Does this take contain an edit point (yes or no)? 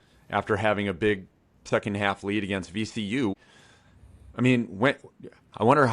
yes